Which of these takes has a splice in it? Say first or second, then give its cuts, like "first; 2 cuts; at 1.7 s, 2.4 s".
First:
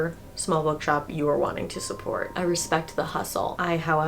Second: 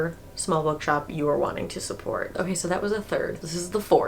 first; 1 cut; at 2.3 s